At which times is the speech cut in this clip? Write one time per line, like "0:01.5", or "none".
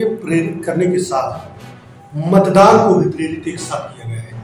none